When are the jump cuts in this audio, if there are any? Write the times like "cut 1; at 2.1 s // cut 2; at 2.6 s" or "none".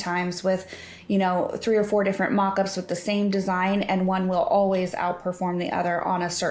none